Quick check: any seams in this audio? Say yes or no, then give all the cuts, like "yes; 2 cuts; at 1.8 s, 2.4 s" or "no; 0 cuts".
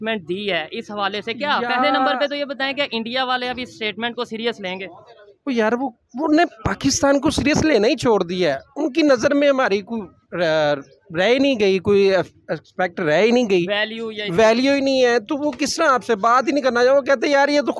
no; 0 cuts